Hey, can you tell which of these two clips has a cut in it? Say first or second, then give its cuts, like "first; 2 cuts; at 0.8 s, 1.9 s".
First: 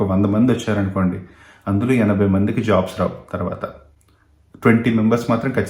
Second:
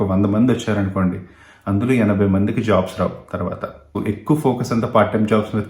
second; 1 cut; at 4.0 s